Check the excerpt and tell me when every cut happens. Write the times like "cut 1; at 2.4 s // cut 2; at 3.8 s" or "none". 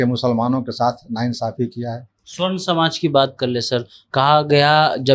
none

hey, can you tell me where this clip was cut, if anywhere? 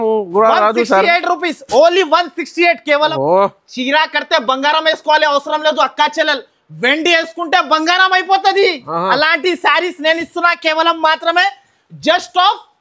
cut 1; at 3.1 s

